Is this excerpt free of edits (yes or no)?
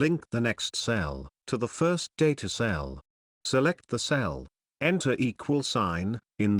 no